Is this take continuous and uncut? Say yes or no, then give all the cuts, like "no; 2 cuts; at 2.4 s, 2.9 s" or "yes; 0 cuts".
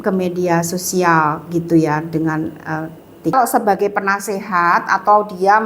no; 1 cut; at 3.3 s